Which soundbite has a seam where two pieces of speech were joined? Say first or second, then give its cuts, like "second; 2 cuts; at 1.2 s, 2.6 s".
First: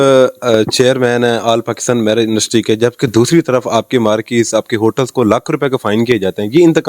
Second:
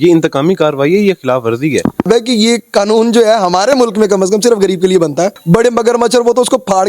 second; 2 cuts; at 2.1 s, 5.4 s